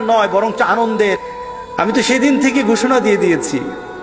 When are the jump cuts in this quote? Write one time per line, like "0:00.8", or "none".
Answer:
0:01.2

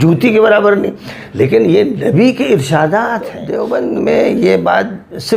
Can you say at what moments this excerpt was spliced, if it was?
0:03.5

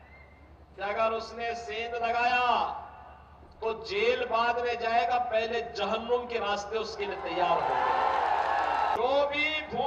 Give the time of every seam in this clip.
0:08.9

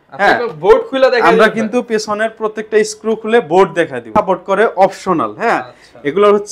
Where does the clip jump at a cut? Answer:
0:04.0

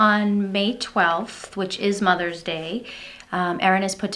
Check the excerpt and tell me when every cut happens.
none

